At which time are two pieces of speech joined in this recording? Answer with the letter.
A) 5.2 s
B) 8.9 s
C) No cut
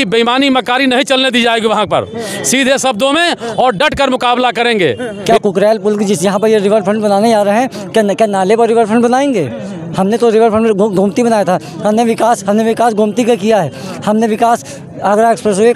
C